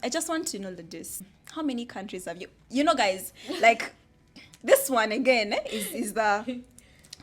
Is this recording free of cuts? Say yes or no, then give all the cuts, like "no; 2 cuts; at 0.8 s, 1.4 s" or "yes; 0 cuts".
no; 1 cut; at 1.2 s